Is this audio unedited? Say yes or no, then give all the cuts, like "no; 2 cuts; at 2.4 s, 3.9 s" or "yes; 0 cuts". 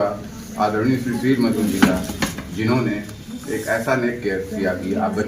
yes; 0 cuts